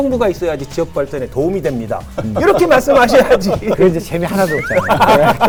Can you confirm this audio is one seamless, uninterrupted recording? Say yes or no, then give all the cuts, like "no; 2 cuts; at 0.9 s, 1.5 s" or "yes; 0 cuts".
yes; 0 cuts